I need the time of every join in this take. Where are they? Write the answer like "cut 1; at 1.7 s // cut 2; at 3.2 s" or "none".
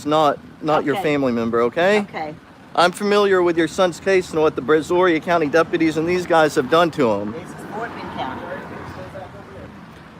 cut 1; at 4.9 s